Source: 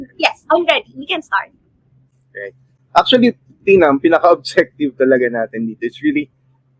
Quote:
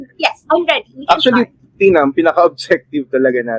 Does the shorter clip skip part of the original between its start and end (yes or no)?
yes